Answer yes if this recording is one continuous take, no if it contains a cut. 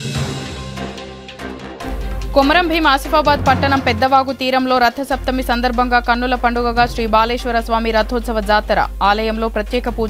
no